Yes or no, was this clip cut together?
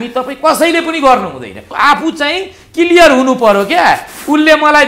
yes